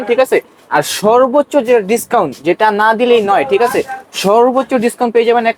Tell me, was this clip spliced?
no; 0 cuts

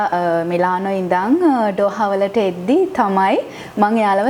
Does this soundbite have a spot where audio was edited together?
no; 0 cuts

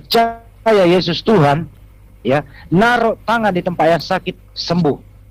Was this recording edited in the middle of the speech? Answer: no; 0 cuts

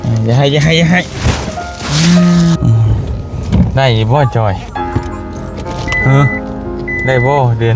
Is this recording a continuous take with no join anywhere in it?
no; 1 cut; at 2.6 s

